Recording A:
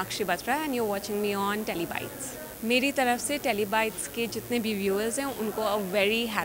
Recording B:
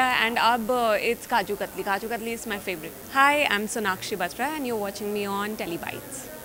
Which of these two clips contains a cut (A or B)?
B